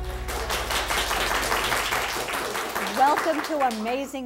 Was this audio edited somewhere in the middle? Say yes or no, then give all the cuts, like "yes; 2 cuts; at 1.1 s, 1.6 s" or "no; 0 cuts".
yes; 1 cut; at 2.3 s